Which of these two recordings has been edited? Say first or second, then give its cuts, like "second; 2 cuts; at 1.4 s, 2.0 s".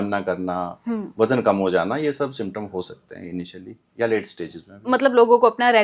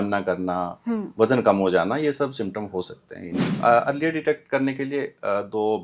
second; 1 cut; at 3.5 s